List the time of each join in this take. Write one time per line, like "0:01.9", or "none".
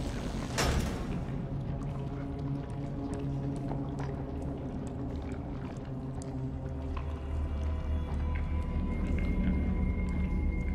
none

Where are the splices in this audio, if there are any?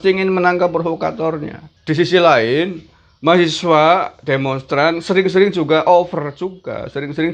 0:01.7

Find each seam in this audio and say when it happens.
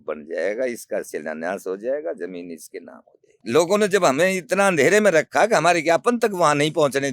0:03.3

